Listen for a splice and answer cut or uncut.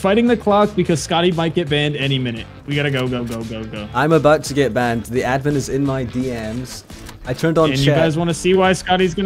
uncut